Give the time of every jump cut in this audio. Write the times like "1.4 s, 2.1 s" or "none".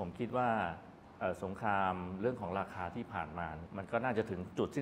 3.6 s